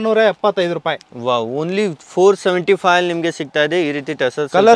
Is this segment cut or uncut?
uncut